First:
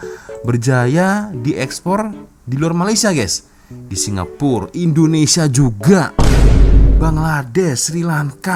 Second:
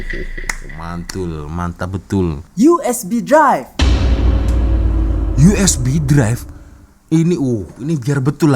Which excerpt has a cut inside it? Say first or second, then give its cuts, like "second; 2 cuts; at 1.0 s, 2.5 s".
second; 1 cut; at 2.4 s